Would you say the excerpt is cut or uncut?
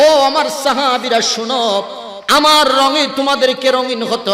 uncut